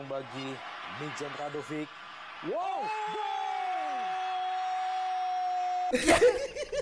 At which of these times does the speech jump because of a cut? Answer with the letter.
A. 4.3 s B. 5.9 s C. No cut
B